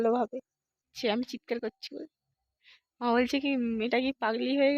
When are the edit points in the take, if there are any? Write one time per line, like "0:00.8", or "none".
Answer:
0:00.9